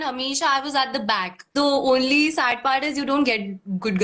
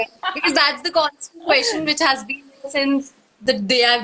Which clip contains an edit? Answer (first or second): first